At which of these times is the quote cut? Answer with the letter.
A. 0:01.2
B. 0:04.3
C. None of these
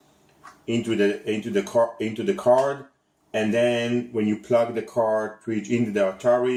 C